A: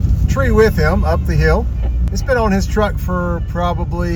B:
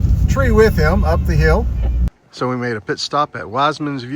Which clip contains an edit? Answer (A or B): B